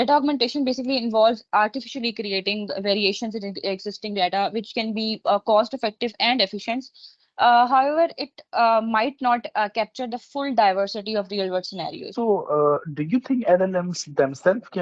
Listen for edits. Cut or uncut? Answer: cut